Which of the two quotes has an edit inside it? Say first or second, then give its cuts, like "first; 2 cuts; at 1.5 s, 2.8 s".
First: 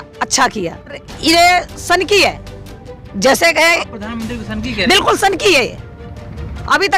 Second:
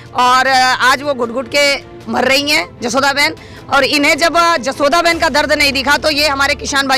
first; 1 cut; at 1.1 s